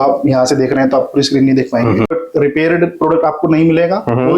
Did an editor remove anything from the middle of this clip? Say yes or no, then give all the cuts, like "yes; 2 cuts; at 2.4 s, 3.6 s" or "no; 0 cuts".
yes; 1 cut; at 2.1 s